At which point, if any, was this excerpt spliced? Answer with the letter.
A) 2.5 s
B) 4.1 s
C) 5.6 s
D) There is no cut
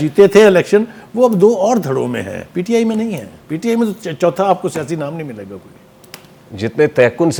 D